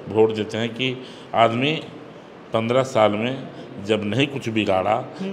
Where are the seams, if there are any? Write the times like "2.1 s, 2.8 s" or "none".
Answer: none